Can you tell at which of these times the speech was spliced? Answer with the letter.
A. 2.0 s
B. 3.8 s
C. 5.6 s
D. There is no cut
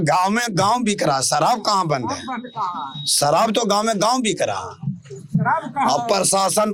D